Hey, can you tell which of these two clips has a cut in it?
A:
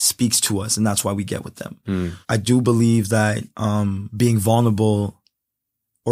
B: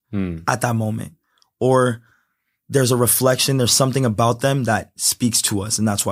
A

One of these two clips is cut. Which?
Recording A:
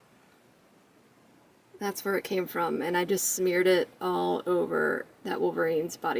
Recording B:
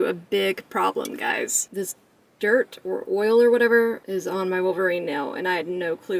B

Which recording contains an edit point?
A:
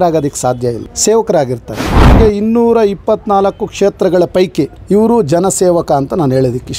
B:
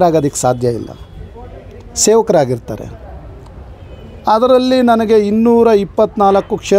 A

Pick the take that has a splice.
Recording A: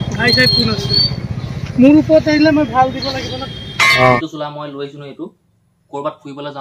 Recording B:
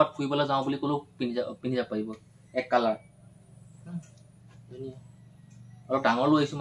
A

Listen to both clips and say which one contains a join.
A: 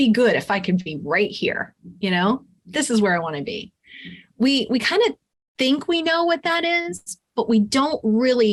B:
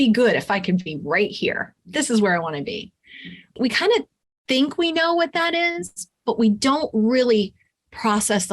B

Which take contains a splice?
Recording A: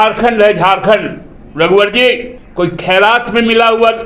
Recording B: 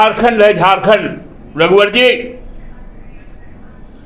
A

